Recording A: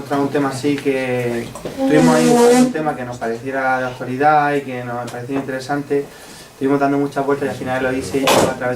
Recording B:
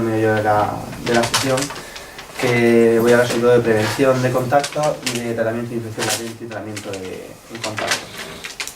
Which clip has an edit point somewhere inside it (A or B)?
B